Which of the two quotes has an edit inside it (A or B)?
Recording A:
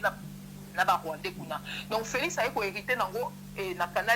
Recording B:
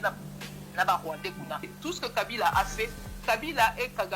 B